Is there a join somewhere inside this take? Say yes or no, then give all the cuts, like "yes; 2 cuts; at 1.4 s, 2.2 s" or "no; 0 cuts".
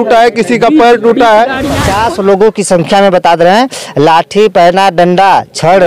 yes; 1 cut; at 1.8 s